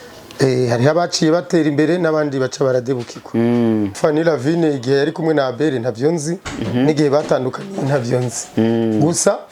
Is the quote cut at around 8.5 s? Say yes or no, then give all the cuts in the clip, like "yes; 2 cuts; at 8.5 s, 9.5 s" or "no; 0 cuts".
no; 1 cut; at 3.9 s